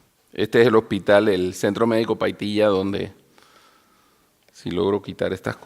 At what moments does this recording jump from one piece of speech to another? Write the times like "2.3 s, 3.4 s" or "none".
1.5 s

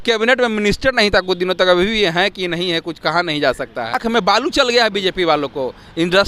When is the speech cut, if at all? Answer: 4.0 s

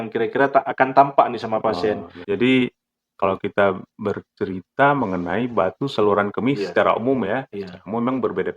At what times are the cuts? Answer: 2.1 s

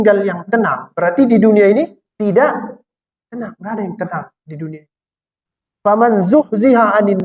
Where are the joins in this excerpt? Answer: 2.0 s

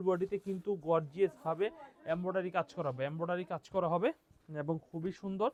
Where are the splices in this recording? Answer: none

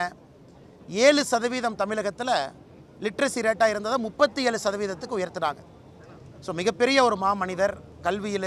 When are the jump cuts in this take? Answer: none

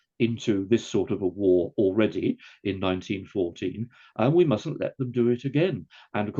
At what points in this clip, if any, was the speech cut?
none

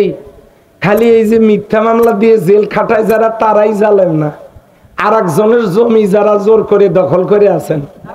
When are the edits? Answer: none

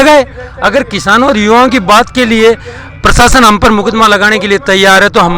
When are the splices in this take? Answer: none

